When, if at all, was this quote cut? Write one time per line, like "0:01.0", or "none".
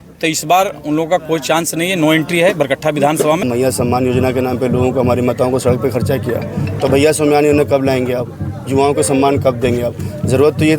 0:03.4